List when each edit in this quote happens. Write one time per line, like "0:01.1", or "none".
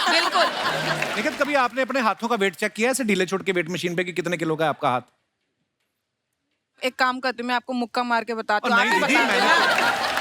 0:01.1